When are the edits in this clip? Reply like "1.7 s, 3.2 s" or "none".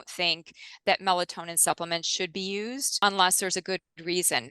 2.9 s